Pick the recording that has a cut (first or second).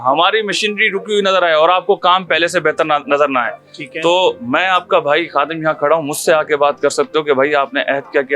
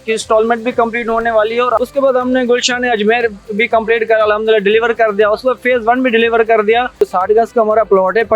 second